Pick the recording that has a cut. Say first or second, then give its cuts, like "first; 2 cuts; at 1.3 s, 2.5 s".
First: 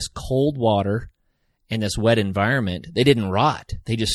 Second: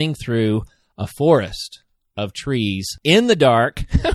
second; 1 cut; at 2.9 s